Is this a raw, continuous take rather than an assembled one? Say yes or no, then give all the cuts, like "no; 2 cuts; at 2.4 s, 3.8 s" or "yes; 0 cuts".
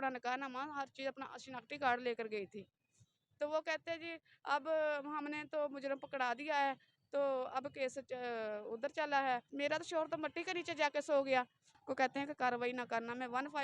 no; 2 cuts; at 9.5 s, 11.7 s